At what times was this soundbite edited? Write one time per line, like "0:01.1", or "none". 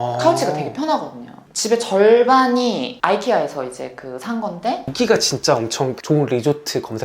0:04.9